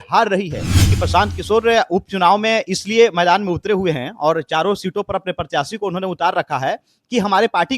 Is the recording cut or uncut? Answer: cut